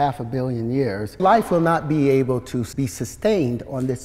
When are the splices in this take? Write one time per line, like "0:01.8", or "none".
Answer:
0:01.2
0:02.7